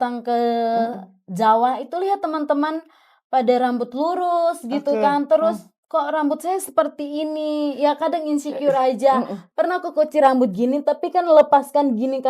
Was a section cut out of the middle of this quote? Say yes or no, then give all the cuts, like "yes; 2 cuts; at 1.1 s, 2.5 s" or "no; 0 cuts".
yes; 2 cuts; at 5.7 s, 9.4 s